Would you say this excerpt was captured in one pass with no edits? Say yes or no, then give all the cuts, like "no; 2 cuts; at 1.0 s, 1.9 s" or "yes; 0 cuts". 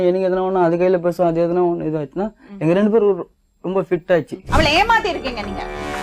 no; 1 cut; at 4.4 s